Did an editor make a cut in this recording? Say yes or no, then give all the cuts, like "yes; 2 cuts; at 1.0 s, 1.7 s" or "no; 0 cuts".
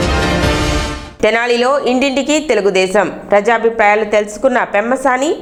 no; 0 cuts